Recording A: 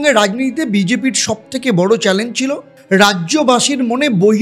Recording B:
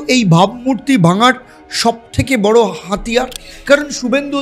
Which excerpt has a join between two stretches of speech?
B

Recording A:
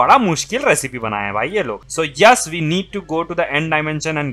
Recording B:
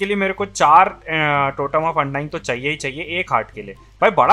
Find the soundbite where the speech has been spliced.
A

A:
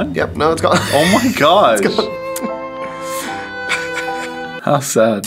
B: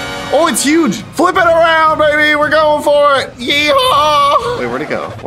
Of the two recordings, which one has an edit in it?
B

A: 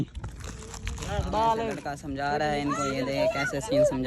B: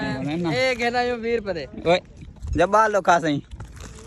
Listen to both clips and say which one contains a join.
A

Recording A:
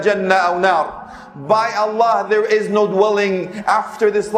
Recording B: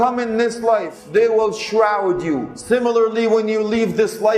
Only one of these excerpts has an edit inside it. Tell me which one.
B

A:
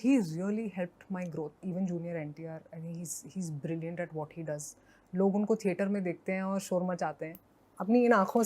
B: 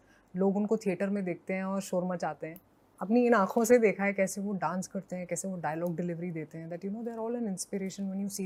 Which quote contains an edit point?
A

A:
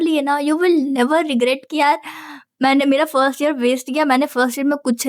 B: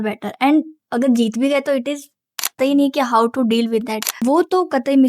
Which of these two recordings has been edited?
B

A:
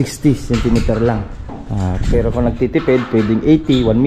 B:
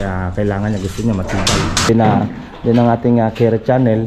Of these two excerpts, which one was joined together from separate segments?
B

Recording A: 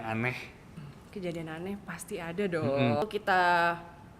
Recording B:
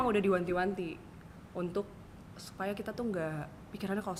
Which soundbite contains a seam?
A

